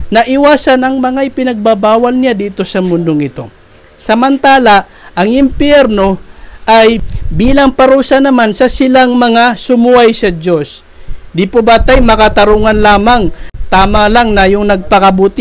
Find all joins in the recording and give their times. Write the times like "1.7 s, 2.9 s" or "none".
7.0 s, 13.5 s